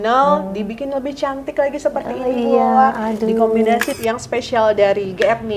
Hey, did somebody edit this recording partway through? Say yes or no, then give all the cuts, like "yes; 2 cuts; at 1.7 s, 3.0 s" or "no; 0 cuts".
yes; 1 cut; at 3.9 s